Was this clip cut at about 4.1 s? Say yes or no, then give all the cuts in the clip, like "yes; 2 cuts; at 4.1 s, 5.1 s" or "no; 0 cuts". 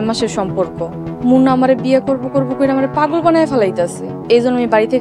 yes; 2 cuts; at 1.1 s, 4.1 s